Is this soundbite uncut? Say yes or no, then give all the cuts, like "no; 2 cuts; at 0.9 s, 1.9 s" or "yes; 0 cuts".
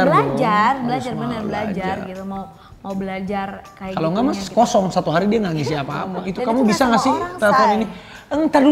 no; 1 cut; at 6.2 s